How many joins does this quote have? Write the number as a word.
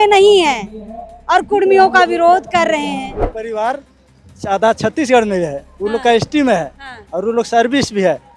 one